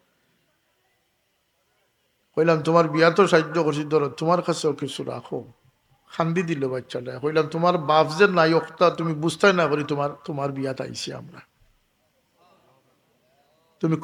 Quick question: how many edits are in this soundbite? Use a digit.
0